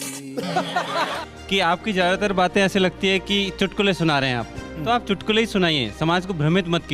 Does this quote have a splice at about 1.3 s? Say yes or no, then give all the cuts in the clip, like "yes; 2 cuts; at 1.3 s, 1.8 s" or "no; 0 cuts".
yes; 1 cut; at 1.3 s